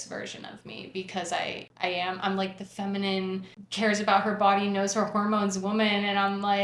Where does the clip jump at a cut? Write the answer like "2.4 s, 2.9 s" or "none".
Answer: 1.7 s, 3.6 s